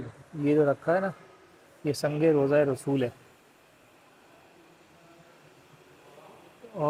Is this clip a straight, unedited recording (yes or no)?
yes